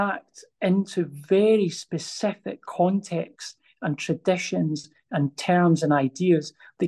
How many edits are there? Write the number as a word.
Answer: zero